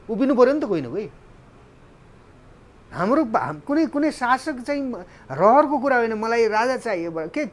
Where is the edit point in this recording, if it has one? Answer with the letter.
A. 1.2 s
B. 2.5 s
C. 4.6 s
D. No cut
D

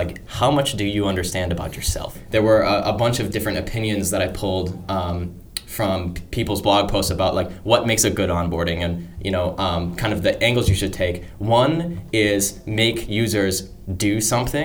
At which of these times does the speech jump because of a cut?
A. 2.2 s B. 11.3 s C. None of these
A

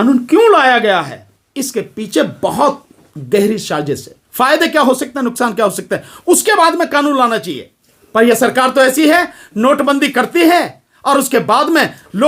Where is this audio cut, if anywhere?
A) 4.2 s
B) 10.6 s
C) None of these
A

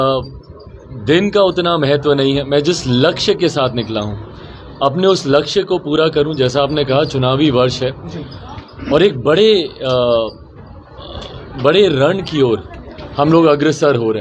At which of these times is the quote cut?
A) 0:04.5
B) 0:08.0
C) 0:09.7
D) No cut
D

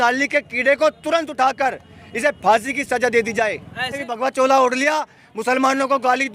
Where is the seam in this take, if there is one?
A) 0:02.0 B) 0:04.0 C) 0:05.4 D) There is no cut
B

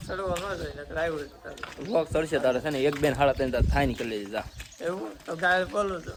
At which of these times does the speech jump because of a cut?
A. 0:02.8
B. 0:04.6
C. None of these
C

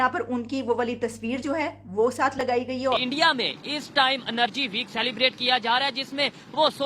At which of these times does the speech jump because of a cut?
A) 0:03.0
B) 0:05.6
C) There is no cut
A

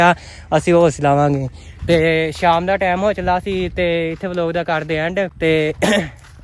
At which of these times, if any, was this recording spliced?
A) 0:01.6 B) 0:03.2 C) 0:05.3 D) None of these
C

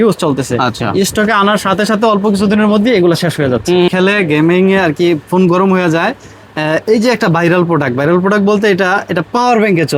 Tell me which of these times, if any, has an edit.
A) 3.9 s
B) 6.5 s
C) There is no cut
A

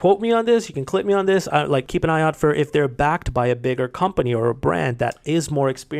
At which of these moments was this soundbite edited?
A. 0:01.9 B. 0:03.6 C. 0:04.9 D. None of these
A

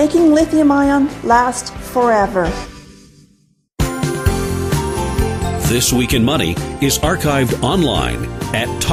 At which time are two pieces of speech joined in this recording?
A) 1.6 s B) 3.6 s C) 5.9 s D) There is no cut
D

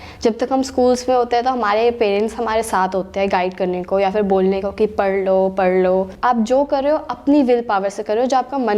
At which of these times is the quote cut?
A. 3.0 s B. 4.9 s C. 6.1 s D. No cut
C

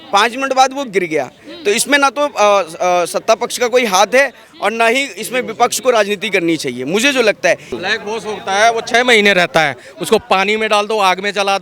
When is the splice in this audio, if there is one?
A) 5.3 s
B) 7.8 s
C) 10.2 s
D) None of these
B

